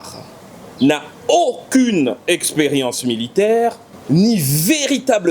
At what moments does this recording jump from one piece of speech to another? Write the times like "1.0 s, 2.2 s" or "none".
3.9 s